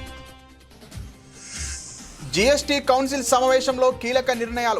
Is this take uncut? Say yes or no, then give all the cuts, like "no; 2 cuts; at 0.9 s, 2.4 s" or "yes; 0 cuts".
yes; 0 cuts